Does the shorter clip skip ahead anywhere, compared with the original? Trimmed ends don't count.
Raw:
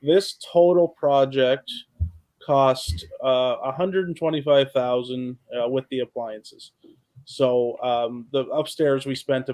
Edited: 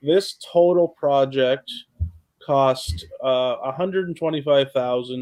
no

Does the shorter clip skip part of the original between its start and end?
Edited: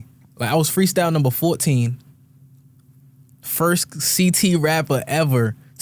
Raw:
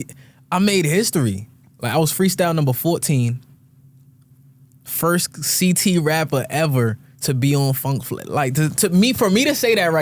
no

